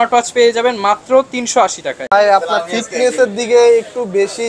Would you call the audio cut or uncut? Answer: uncut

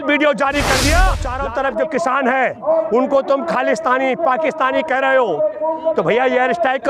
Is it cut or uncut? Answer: cut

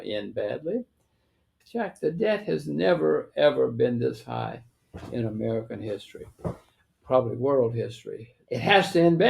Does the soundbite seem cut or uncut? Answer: cut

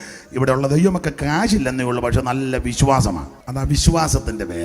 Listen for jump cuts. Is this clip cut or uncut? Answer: cut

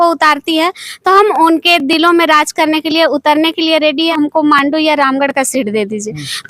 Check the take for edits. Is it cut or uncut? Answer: cut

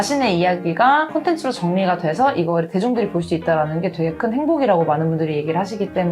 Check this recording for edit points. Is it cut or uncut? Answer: uncut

